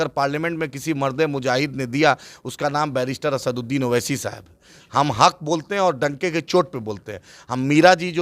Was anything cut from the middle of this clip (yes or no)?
no